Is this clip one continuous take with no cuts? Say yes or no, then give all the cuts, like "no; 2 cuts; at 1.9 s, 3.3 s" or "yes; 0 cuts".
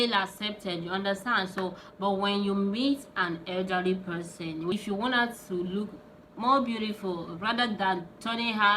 no; 1 cut; at 4.7 s